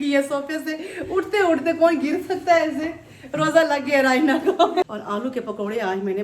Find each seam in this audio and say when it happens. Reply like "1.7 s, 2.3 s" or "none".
4.8 s